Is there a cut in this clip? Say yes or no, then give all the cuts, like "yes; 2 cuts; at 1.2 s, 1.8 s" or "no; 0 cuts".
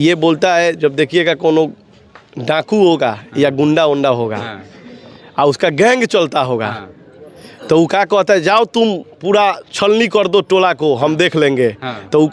no; 0 cuts